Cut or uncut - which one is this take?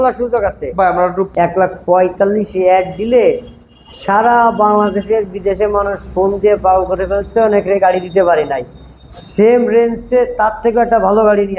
cut